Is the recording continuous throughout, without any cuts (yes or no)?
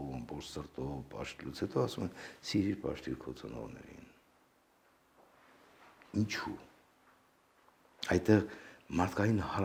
yes